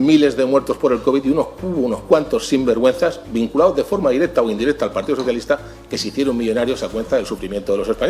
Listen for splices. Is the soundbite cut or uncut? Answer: uncut